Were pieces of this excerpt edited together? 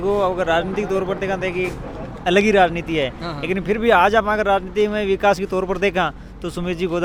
no; 0 cuts

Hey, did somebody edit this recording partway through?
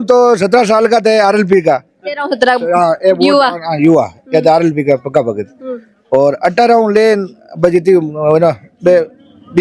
no; 0 cuts

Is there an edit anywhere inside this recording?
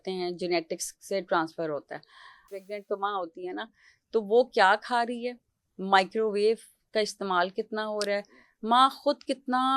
yes; 1 cut; at 2.4 s

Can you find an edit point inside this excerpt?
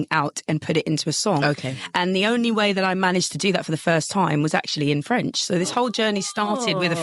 no; 0 cuts

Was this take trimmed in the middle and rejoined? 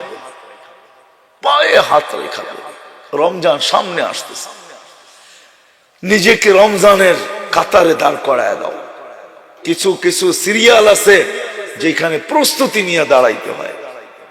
yes; 1 cut; at 9.5 s

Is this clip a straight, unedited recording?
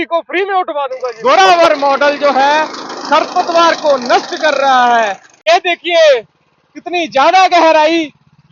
no; 2 cuts; at 1.0 s, 5.3 s

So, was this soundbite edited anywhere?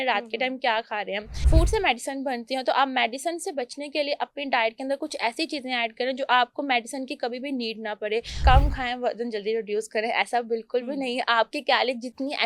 yes; 2 cuts; at 1.3 s, 8.4 s

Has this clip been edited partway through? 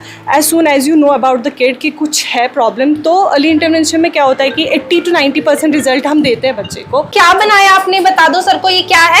yes; 1 cut; at 7.1 s

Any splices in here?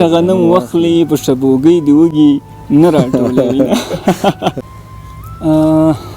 yes; 1 cut; at 4.6 s

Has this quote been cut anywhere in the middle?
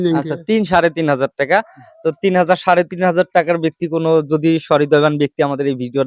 no; 0 cuts

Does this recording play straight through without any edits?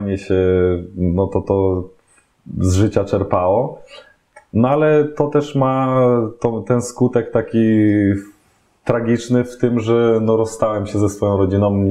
yes; 0 cuts

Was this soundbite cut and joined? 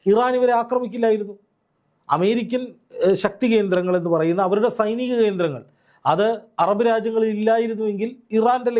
no; 0 cuts

